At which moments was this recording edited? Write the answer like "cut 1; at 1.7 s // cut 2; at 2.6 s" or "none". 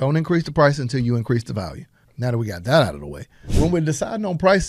cut 1; at 2.0 s // cut 2; at 3.4 s